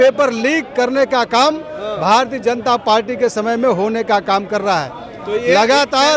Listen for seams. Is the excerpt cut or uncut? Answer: uncut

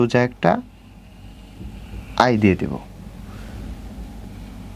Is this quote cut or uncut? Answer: uncut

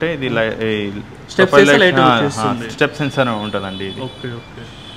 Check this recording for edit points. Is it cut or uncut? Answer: uncut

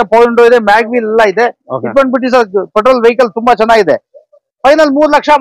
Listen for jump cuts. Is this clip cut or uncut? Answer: uncut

